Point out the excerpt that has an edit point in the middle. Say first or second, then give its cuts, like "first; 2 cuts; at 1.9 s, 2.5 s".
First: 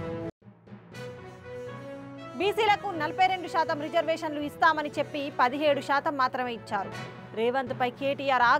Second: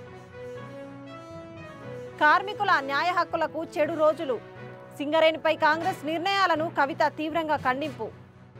first; 1 cut; at 1.9 s